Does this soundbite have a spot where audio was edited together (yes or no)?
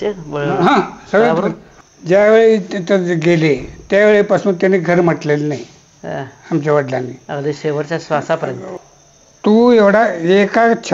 yes